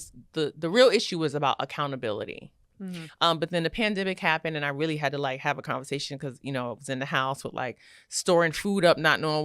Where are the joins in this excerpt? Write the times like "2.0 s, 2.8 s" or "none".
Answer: 3.0 s